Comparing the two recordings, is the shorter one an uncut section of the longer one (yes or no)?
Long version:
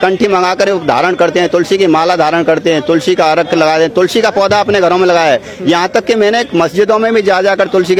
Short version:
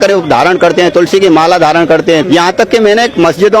no